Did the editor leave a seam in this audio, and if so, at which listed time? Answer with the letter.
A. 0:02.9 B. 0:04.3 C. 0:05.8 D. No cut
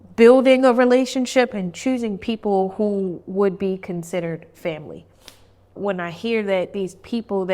C